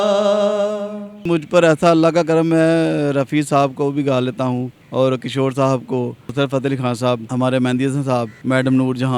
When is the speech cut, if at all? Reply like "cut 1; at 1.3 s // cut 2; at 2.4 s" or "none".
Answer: cut 1; at 1.2 s // cut 2; at 4.8 s // cut 3; at 6.2 s // cut 4; at 7.3 s // cut 5; at 8.3 s